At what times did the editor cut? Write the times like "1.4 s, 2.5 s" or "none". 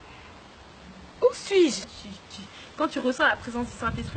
1.8 s